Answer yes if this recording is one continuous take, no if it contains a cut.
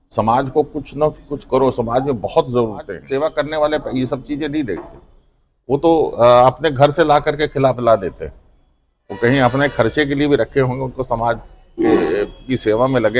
no